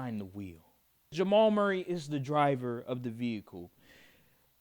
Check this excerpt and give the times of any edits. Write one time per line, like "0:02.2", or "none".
0:01.1

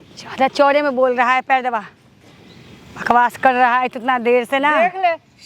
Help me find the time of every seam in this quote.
none

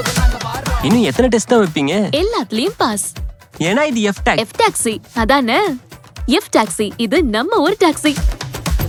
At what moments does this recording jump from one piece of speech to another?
none

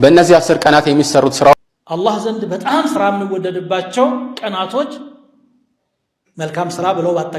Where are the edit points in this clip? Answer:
0:01.5

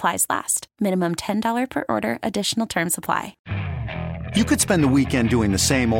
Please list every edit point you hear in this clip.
0:03.4

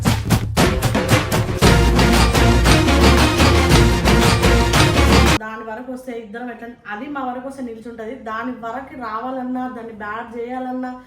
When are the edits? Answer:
0:05.4

